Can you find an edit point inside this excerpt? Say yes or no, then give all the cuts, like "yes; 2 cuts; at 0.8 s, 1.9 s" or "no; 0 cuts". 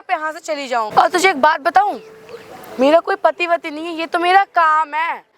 yes; 1 cut; at 0.9 s